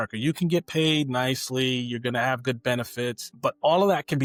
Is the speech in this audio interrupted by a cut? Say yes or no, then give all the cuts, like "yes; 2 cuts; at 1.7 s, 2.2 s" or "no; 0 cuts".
no; 0 cuts